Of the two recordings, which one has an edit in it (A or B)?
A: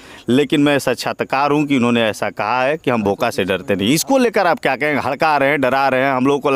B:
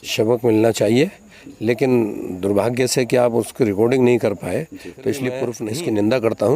B